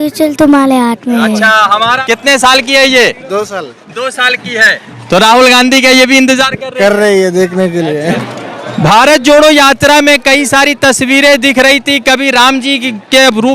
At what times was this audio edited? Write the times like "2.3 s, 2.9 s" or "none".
2.0 s, 8.2 s